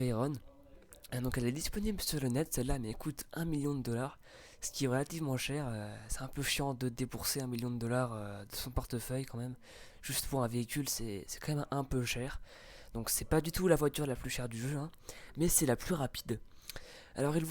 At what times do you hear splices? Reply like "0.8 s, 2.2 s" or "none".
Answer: 3.1 s